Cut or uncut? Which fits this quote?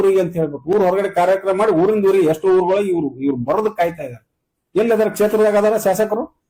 uncut